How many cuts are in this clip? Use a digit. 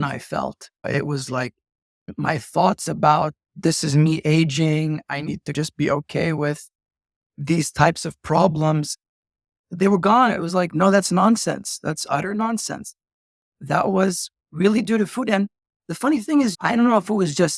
0